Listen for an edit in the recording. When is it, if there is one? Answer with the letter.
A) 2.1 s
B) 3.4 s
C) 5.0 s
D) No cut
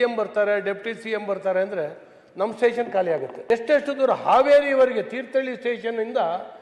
B